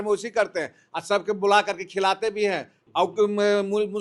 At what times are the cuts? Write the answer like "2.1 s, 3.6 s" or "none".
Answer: 2.7 s